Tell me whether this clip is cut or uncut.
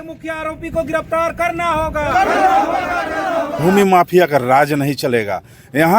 cut